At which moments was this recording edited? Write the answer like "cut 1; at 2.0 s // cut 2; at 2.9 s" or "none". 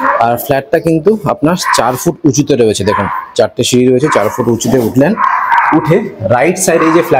none